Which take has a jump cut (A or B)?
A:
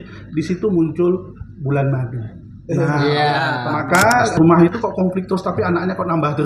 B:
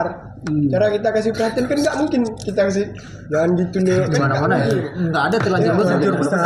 A